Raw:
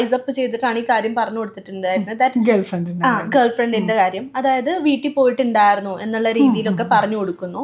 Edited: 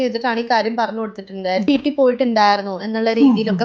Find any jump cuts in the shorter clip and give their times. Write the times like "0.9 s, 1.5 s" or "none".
1.7 s